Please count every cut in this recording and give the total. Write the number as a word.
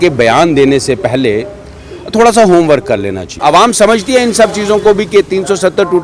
one